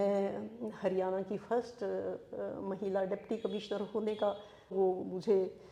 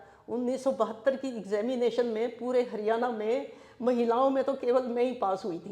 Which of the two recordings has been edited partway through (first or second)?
first